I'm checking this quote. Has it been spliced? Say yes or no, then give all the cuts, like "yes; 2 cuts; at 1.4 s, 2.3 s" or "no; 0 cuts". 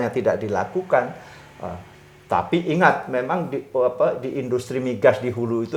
no; 0 cuts